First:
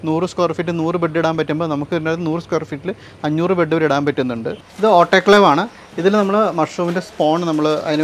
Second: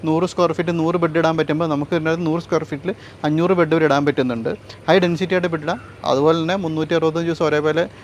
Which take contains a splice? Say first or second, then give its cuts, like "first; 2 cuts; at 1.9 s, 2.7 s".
first; 1 cut; at 4.6 s